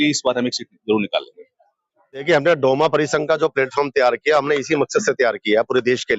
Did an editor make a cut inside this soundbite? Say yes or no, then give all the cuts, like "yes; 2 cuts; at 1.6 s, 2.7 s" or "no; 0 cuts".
no; 0 cuts